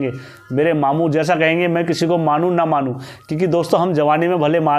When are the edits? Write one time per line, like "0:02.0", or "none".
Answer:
none